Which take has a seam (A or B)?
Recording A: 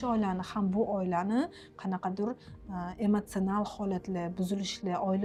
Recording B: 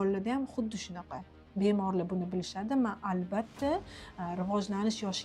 B